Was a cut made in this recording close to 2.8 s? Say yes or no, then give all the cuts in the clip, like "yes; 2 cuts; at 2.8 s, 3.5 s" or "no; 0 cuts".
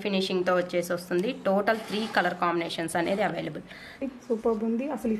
no; 1 cut; at 4.0 s